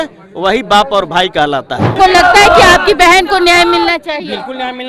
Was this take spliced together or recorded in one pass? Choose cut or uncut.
cut